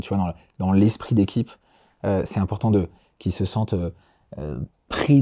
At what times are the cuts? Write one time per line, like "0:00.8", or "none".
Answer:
none

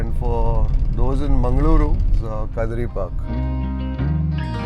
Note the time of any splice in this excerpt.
0:02.1
0:03.2

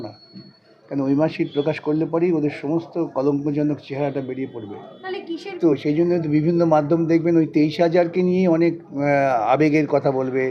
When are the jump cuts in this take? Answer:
0:05.8

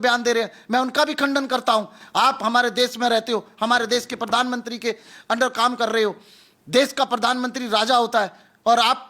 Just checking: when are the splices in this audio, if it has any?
none

